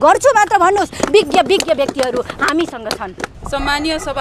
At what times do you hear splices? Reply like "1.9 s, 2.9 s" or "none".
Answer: 3.3 s